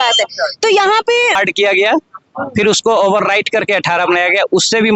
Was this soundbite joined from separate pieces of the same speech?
yes; 1 cut; at 1.4 s

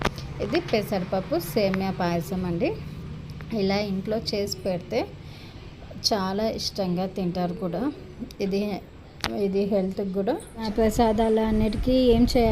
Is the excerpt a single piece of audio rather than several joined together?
no; 1 cut; at 10.7 s

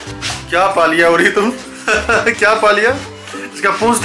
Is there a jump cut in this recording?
no; 0 cuts

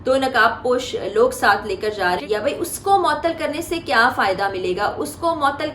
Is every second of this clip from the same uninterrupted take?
no; 1 cut; at 2.2 s

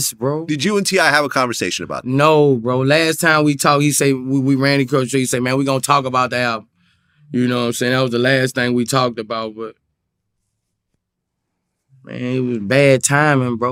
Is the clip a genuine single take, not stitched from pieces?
yes; 0 cuts

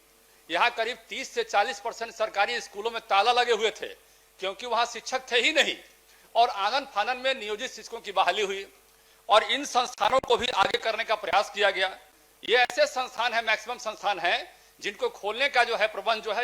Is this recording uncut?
yes; 0 cuts

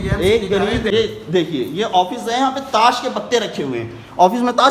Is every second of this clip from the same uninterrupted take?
no; 1 cut; at 0.9 s

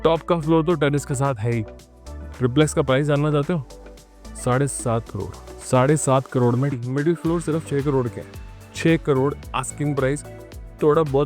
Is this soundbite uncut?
no; 1 cut; at 6.8 s

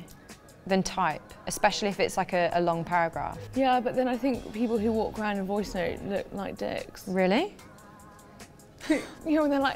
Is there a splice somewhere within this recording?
no; 0 cuts

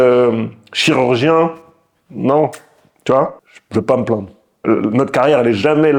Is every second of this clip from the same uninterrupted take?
no; 2 cuts; at 3.4 s, 4.5 s

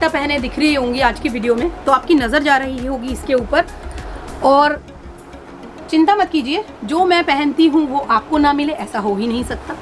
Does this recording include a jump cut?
no; 0 cuts

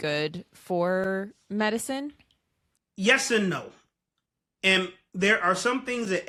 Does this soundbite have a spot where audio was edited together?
no; 0 cuts

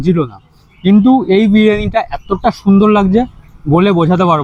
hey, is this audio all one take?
yes; 0 cuts

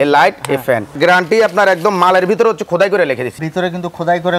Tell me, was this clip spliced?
yes; 1 cut; at 1.0 s

